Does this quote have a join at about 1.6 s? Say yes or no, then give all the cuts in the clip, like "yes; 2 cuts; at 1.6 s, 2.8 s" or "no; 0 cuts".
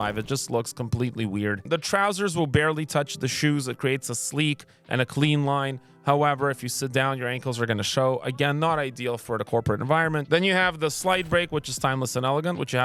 no; 0 cuts